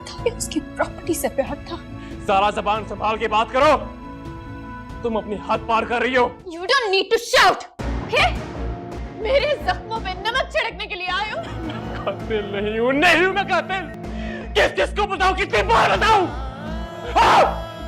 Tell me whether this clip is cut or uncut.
cut